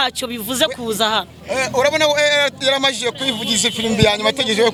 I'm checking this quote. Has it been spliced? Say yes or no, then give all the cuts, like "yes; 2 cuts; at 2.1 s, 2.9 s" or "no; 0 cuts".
no; 0 cuts